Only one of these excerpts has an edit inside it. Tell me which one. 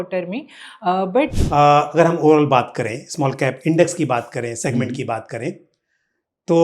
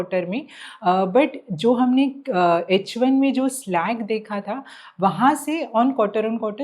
first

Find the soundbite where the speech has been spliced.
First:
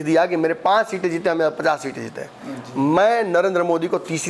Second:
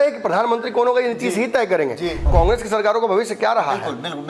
second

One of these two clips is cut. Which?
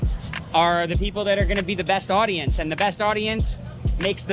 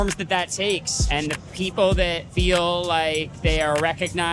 second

